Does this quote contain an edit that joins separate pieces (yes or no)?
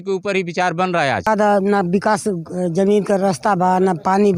yes